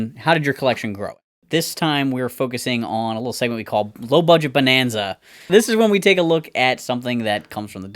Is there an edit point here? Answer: yes; 2 cuts; at 1.3 s, 5.5 s

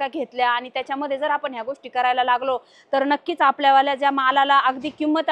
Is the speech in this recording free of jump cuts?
yes; 0 cuts

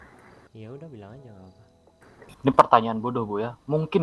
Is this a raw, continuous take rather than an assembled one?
no; 1 cut; at 2.2 s

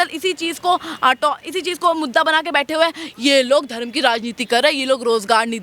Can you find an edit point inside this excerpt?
no; 0 cuts

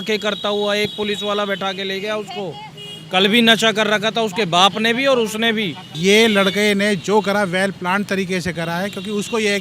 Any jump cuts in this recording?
yes; 1 cut; at 5.9 s

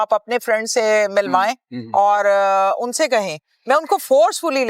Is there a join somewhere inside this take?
no; 0 cuts

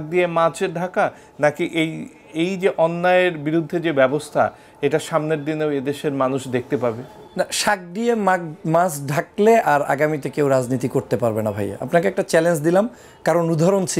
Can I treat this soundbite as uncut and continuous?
yes; 0 cuts

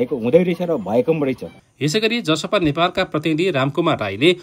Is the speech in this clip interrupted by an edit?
no; 0 cuts

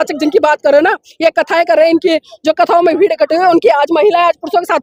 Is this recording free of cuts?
yes; 0 cuts

